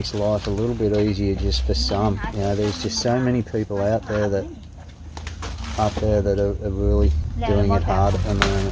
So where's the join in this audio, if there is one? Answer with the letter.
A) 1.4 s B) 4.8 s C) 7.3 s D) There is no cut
C